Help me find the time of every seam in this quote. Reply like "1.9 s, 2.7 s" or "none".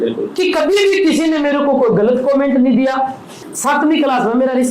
3.3 s